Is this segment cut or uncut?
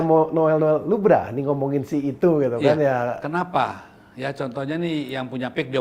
uncut